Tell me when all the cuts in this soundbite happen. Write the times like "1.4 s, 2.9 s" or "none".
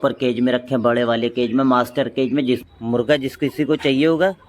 2.6 s